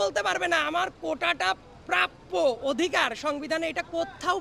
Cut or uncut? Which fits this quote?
uncut